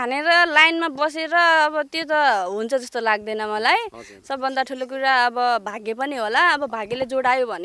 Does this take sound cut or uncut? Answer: uncut